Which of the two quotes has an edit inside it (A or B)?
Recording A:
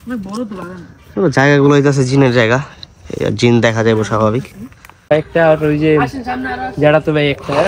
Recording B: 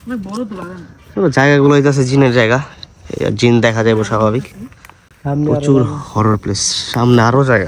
A